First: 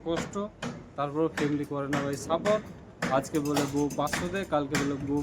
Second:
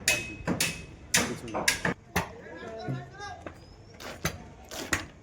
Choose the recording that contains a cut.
second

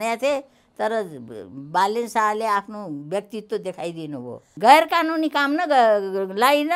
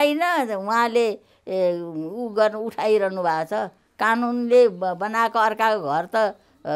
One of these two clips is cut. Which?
first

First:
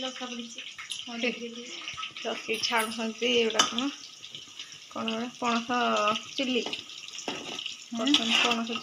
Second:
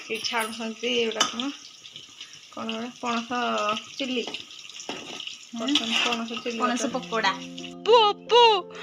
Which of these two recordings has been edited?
second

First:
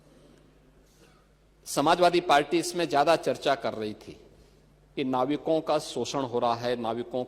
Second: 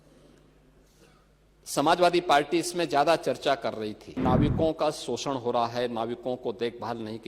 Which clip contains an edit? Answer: second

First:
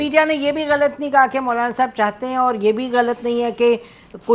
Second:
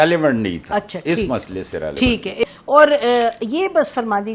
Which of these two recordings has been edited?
second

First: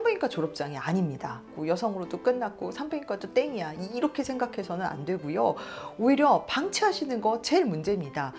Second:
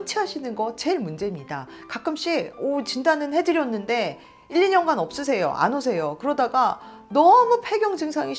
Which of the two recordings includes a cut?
first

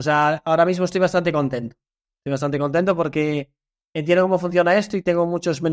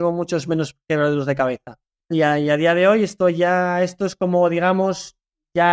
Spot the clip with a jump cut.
second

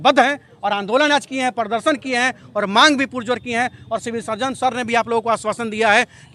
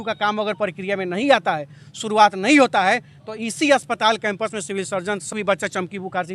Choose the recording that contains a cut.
second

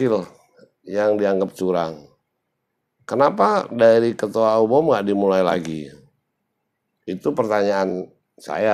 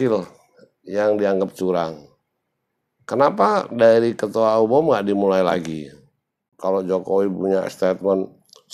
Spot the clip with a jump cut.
second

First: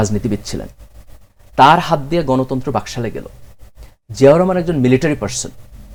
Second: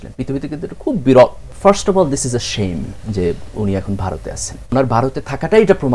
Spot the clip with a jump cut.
second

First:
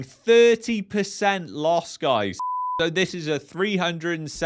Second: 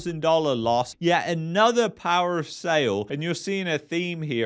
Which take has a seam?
first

